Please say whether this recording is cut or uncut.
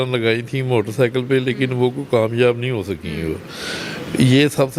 uncut